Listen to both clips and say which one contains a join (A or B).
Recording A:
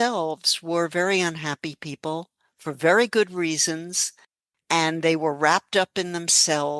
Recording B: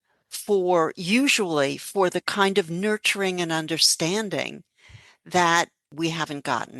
B